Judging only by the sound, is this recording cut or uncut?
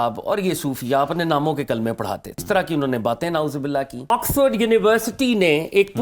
cut